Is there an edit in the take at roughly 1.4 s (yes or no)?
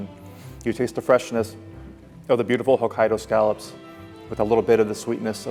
no